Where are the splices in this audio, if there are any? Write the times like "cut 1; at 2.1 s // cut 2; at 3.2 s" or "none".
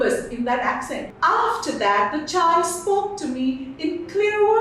cut 1; at 1.0 s